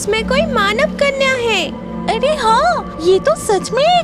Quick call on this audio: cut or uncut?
cut